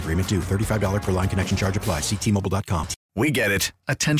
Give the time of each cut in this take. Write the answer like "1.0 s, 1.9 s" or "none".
3.0 s